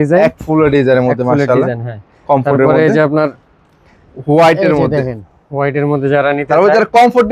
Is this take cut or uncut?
uncut